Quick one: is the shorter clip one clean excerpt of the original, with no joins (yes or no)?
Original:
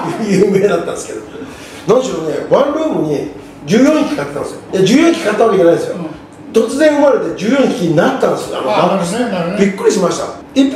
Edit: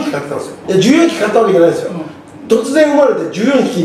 yes